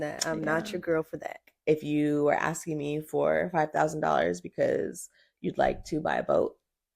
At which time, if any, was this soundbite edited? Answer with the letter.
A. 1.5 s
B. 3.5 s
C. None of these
A